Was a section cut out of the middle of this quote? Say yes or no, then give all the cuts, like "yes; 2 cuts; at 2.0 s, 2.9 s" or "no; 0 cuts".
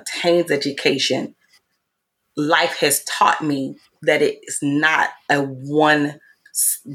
no; 0 cuts